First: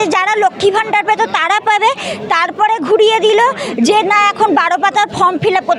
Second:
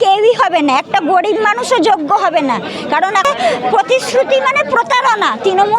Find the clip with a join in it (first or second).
second